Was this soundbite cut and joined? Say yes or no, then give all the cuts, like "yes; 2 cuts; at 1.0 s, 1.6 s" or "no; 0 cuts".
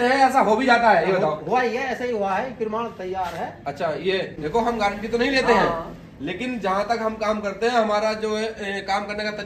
yes; 1 cut; at 4.4 s